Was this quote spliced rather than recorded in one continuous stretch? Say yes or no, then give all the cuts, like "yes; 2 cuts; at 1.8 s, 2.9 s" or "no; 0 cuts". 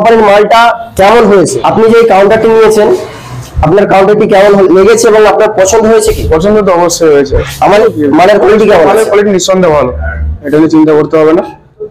yes; 2 cuts; at 1.6 s, 7.8 s